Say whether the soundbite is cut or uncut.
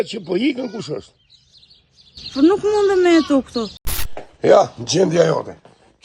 cut